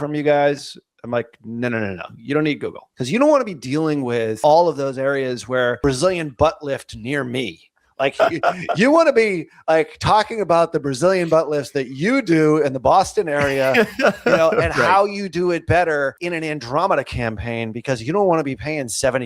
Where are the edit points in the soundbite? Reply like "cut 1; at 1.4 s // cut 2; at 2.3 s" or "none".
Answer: cut 1; at 2.9 s // cut 2; at 4.4 s // cut 3; at 5.8 s // cut 4; at 16.2 s